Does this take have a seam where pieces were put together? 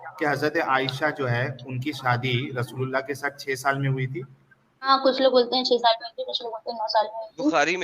yes; 1 cut; at 4.9 s

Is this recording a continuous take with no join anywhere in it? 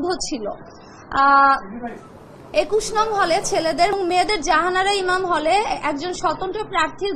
no; 1 cut; at 3.9 s

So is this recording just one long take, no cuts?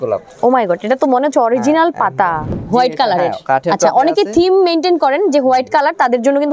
no; 1 cut; at 2.6 s

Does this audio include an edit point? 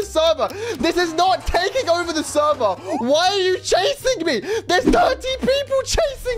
no; 0 cuts

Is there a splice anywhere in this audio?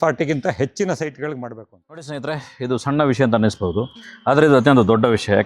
yes; 1 cut; at 2.0 s

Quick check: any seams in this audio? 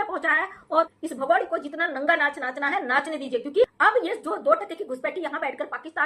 yes; 2 cuts; at 0.9 s, 3.6 s

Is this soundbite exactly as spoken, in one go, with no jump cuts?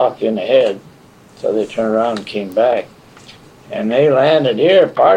yes; 0 cuts

